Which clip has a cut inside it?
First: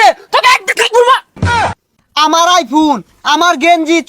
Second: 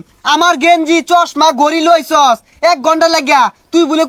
first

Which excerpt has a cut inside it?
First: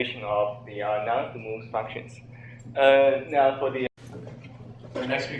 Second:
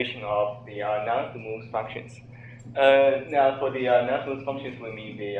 second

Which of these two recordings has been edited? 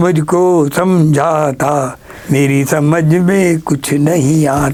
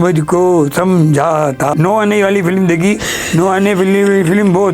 second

